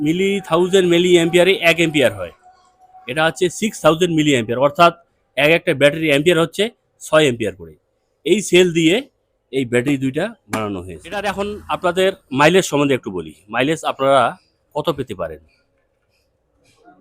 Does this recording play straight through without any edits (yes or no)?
no